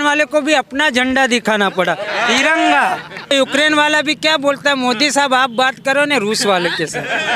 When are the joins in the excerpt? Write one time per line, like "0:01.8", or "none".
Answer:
0:03.3